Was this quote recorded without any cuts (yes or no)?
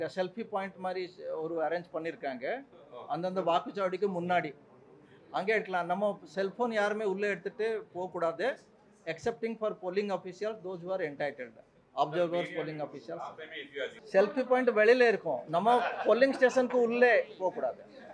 no